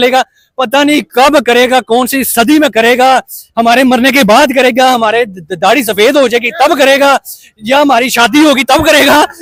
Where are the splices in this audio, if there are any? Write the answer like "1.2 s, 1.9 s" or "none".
none